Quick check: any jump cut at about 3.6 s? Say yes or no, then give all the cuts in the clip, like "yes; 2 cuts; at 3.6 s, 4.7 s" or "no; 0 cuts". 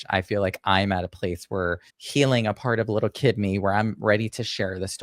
no; 1 cut; at 1.9 s